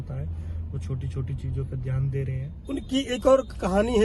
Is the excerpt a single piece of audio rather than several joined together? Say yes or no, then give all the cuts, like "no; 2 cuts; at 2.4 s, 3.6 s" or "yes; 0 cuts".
no; 1 cut; at 2.5 s